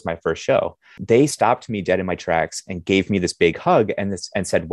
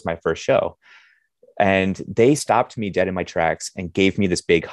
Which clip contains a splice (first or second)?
first